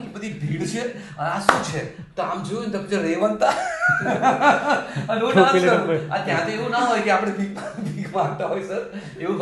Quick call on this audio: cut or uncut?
uncut